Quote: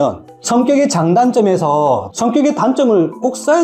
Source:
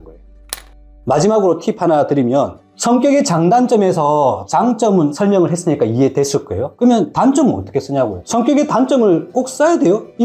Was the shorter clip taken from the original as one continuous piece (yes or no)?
no